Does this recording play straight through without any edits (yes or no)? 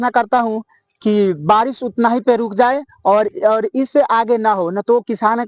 yes